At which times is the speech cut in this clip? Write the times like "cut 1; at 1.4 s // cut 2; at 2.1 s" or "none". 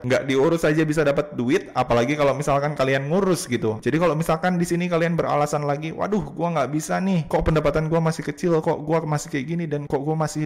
cut 1; at 3.8 s